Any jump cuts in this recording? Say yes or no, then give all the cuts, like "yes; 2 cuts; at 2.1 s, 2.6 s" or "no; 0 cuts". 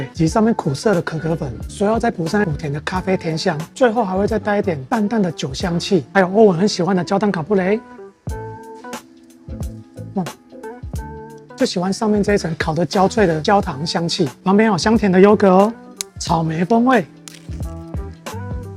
no; 0 cuts